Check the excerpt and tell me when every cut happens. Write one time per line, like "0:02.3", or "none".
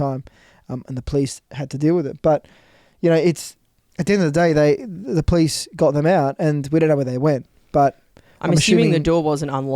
none